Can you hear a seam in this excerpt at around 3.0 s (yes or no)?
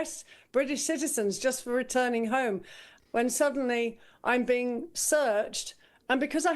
yes